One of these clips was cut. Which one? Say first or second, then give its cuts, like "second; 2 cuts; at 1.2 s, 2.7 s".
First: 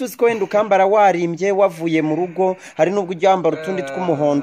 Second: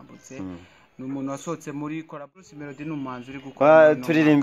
second; 1 cut; at 2.2 s